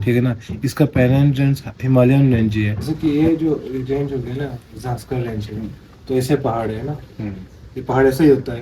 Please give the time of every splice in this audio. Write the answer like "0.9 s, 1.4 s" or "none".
2.8 s